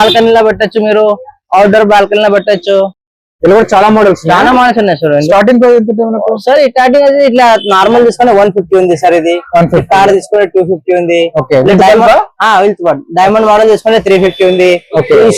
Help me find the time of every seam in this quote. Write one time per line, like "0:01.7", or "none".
none